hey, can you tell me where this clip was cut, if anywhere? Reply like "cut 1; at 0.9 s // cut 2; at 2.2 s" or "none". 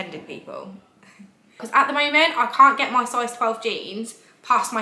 cut 1; at 1.6 s